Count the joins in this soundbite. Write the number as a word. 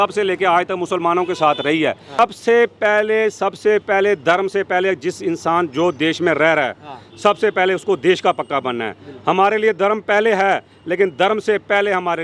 one